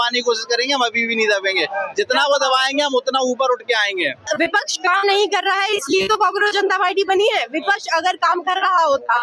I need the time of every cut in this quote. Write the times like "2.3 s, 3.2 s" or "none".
4.3 s